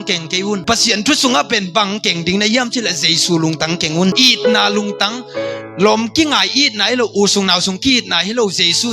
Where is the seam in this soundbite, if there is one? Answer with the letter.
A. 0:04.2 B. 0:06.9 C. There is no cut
A